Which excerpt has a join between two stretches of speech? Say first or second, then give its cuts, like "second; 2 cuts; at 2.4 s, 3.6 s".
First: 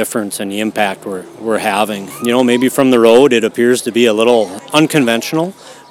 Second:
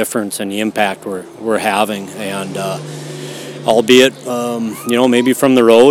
first; 2 cuts; at 2.1 s, 4.6 s